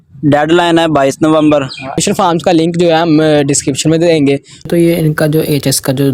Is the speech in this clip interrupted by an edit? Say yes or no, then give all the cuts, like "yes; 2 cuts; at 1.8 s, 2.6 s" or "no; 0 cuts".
yes; 2 cuts; at 2.0 s, 4.7 s